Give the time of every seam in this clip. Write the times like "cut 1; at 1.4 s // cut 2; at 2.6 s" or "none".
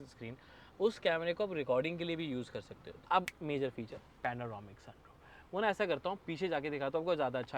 cut 1; at 3.0 s